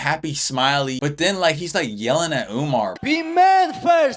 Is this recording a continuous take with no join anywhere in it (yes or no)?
yes